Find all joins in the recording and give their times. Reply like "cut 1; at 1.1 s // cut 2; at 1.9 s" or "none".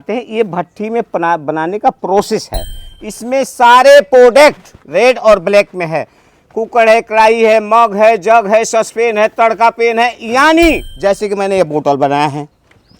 cut 1; at 2.9 s // cut 2; at 10.9 s